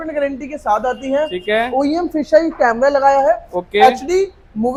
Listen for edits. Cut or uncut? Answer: uncut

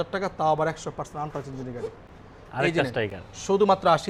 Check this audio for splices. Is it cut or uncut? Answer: uncut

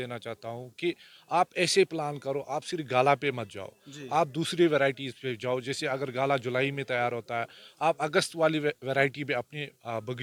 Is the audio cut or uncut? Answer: uncut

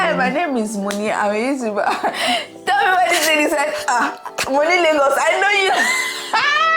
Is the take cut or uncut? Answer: uncut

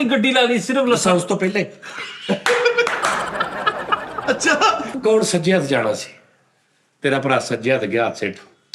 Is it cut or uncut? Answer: cut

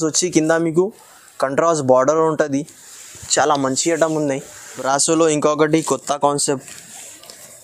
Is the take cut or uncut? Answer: cut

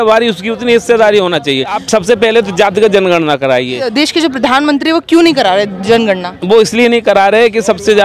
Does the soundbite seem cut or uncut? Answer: cut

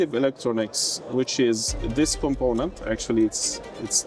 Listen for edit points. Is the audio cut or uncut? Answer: uncut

